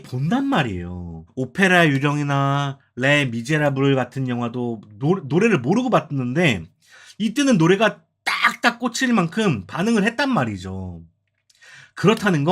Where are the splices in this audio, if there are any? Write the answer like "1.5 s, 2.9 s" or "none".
none